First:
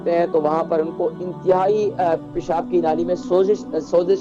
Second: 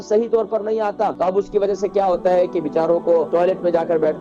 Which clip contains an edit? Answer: second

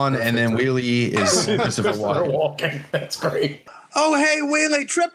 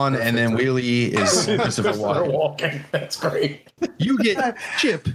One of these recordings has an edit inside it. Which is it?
first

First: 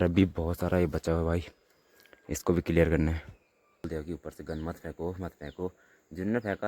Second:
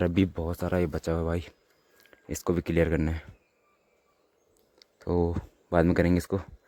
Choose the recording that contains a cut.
first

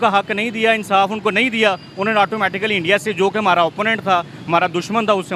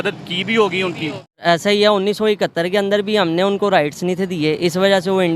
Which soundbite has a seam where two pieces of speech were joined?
second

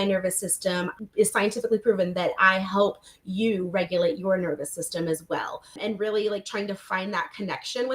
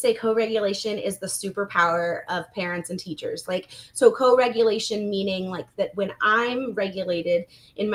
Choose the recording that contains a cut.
first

